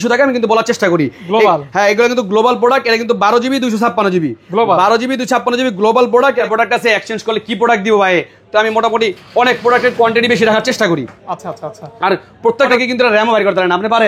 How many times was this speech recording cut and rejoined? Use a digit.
2